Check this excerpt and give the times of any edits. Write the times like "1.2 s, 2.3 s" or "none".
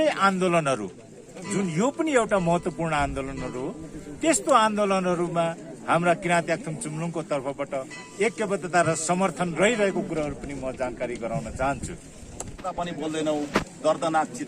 12.6 s